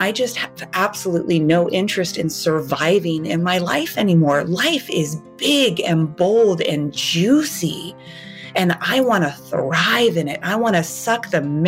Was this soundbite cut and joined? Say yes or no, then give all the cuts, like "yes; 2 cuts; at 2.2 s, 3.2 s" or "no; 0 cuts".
no; 0 cuts